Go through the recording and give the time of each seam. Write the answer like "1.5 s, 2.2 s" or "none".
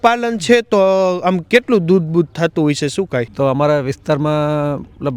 3.3 s